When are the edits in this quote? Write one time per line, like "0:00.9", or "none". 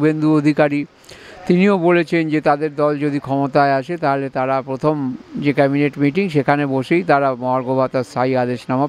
none